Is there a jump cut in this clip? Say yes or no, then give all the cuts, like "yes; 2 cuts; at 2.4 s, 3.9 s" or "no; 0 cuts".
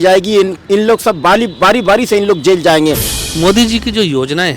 yes; 1 cut; at 3.1 s